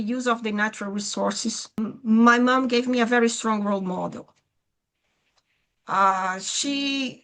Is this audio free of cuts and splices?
no; 1 cut; at 1.8 s

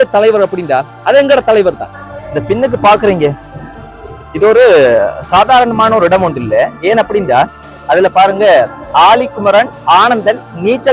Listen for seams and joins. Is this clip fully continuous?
no; 1 cut; at 1.9 s

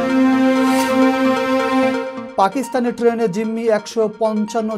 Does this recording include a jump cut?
no; 0 cuts

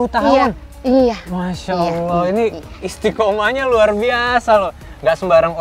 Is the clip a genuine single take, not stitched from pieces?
yes; 0 cuts

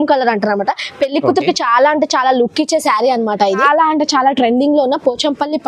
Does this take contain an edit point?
yes; 1 cut; at 3.6 s

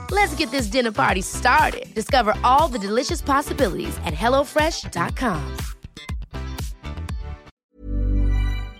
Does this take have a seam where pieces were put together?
yes; 1 cut; at 7.6 s

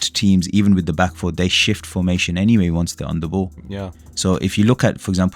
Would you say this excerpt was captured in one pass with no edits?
no; 1 cut; at 3.7 s

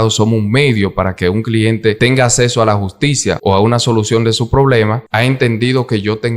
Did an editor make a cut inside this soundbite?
yes; 3 cuts; at 2.0 s, 3.4 s, 5.0 s

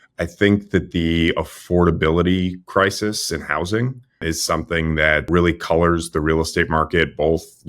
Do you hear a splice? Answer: yes; 2 cuts; at 4.2 s, 5.3 s

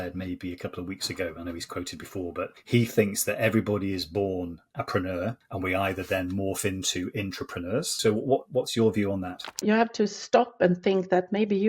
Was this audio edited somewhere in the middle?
yes; 4 cuts; at 2.6 s, 5.4 s, 7.9 s, 9.6 s

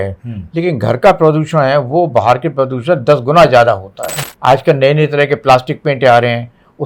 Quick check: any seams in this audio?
yes; 1 cut; at 4.1 s

